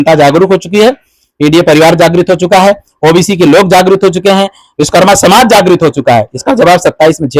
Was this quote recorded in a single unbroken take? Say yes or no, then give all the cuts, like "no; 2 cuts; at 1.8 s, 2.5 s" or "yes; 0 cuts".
yes; 0 cuts